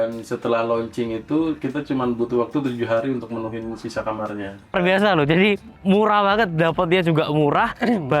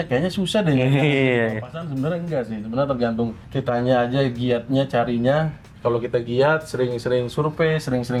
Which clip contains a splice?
first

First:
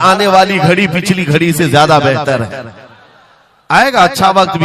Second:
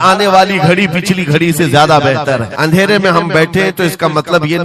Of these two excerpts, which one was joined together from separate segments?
second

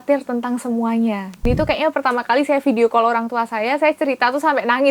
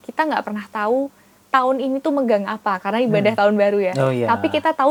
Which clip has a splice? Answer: first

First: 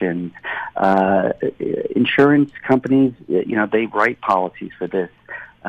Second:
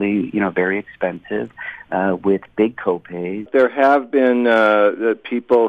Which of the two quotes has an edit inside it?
second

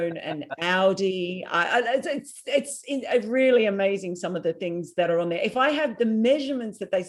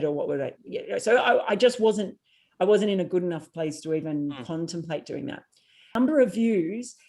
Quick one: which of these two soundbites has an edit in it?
second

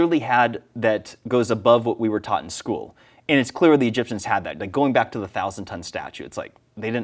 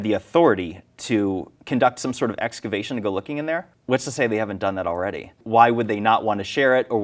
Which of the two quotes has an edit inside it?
second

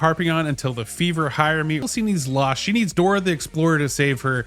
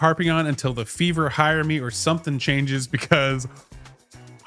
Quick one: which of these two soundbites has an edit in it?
first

